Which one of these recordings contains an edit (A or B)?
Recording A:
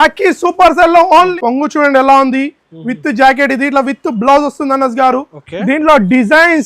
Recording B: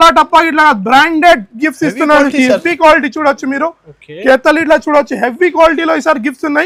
A